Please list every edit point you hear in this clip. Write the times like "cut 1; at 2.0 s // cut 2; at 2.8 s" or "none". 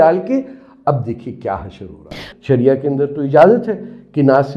cut 1; at 2.2 s